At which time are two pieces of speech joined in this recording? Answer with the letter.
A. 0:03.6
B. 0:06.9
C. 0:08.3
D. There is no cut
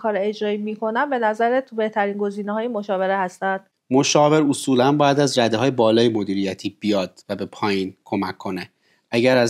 A